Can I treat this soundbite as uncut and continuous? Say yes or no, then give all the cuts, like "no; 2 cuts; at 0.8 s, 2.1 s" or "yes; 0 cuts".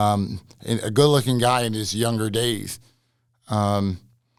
yes; 0 cuts